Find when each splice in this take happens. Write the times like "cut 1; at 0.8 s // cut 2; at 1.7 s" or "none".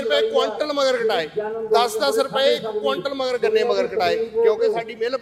none